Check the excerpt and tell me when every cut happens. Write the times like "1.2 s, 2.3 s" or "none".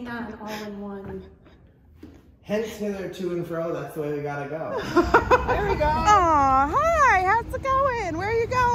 5.5 s